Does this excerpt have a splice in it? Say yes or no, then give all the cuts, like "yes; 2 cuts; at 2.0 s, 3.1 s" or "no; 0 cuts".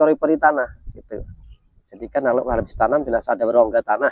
no; 0 cuts